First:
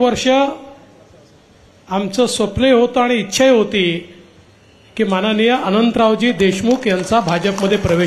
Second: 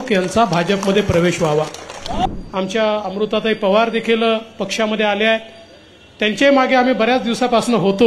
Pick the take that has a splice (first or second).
second